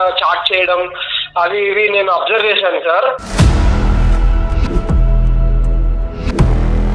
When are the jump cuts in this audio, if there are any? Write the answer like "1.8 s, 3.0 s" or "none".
3.2 s